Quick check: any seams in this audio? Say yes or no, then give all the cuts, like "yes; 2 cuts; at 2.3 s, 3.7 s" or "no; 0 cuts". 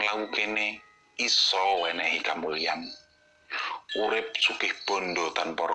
no; 0 cuts